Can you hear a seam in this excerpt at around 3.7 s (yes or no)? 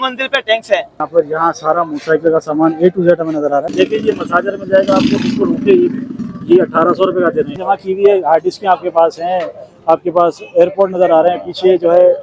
yes